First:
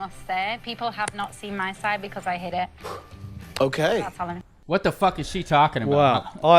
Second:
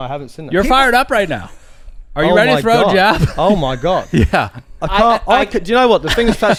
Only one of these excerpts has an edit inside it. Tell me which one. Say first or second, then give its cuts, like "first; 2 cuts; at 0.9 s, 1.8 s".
first; 1 cut; at 4.5 s